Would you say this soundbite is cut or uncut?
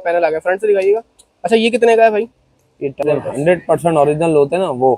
cut